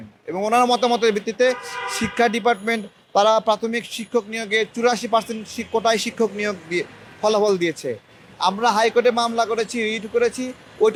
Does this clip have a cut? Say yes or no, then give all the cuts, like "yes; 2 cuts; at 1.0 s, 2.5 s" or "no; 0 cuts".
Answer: no; 0 cuts